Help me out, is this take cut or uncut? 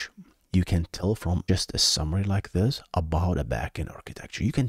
cut